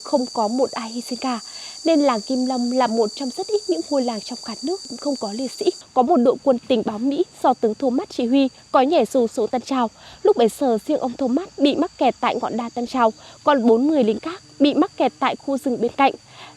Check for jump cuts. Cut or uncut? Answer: cut